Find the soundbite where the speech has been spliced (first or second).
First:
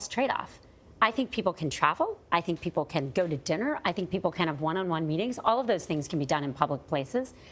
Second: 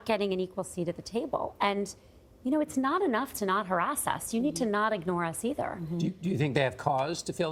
second